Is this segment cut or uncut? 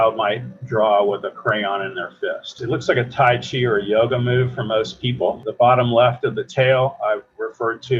cut